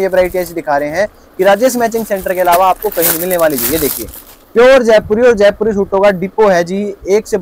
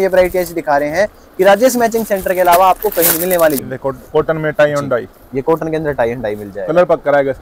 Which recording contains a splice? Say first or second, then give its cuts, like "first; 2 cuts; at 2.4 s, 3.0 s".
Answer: second; 1 cut; at 3.6 s